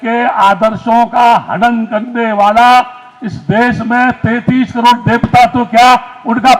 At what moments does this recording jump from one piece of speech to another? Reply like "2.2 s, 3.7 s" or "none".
none